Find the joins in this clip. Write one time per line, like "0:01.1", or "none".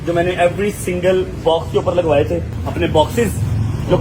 0:02.6